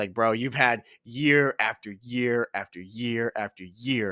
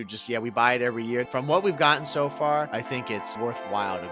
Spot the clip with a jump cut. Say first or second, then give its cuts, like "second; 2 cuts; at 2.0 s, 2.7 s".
second; 2 cuts; at 1.3 s, 3.3 s